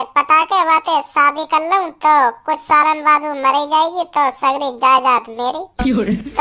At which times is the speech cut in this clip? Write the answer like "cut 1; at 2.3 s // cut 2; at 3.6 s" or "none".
none